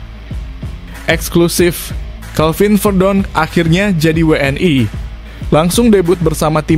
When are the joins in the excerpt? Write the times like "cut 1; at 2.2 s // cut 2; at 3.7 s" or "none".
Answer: cut 1; at 1.0 s